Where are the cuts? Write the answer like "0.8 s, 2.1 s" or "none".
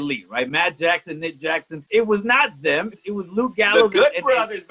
1.8 s, 2.9 s